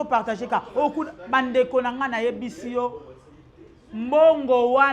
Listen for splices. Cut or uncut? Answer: uncut